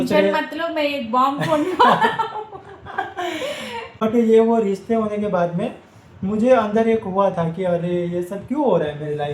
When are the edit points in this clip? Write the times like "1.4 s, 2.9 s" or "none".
3.9 s